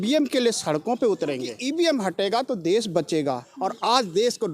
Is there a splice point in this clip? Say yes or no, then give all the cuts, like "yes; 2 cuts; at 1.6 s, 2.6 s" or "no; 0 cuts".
yes; 2 cuts; at 1.5 s, 3.5 s